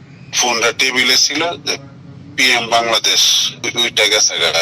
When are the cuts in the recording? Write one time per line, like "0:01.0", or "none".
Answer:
0:03.7